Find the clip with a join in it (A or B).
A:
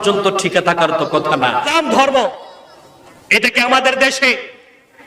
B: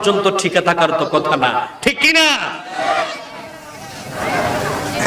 A